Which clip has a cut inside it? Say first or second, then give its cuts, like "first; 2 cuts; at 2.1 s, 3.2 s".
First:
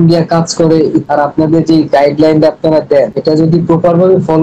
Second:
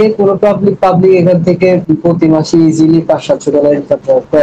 first; 1 cut; at 1.0 s